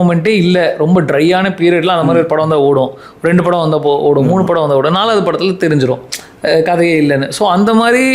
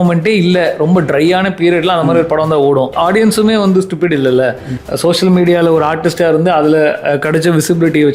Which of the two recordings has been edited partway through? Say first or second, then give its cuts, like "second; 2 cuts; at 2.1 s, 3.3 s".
second; 2 cuts; at 2.9 s, 4.7 s